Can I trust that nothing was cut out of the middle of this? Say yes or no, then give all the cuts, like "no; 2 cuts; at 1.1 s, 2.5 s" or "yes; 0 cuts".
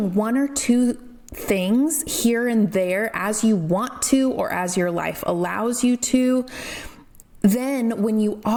yes; 0 cuts